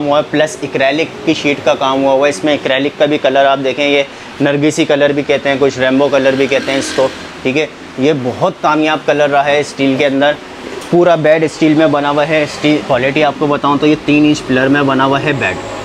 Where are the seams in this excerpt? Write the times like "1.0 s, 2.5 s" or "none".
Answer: none